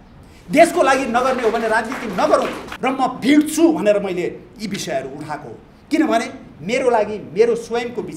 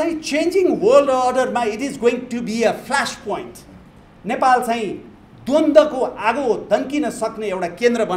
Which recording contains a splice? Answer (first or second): first